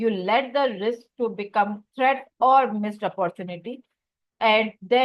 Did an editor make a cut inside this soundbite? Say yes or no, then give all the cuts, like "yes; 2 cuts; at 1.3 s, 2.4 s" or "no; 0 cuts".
yes; 1 cut; at 1.8 s